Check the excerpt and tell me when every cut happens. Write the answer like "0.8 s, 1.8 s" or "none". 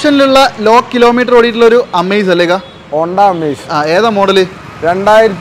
none